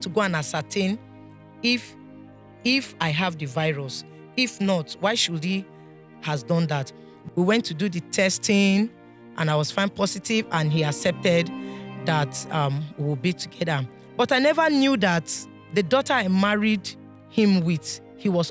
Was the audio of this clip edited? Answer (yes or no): yes